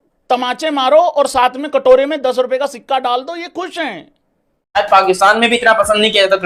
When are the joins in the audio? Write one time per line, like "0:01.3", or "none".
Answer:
0:04.8